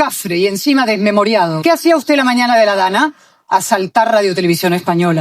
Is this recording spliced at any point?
yes; 1 cut; at 1.5 s

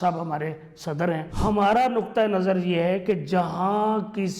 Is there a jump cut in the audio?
yes; 1 cut; at 1.3 s

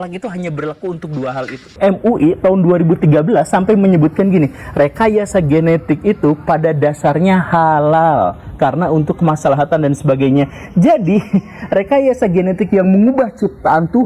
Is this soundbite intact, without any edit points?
no; 1 cut; at 1.8 s

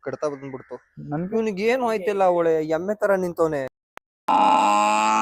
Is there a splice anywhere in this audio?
no; 0 cuts

